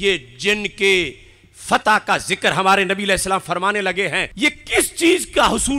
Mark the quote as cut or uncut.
cut